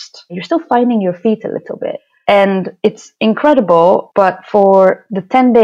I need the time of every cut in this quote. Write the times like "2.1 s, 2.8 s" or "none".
none